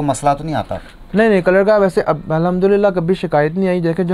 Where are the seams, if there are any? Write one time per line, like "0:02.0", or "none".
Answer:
none